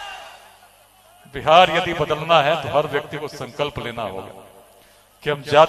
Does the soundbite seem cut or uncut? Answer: uncut